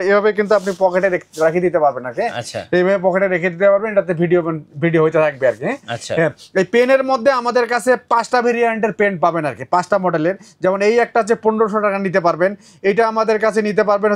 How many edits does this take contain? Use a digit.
0